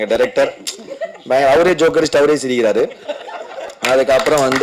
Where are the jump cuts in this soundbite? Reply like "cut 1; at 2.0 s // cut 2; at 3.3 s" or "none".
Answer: none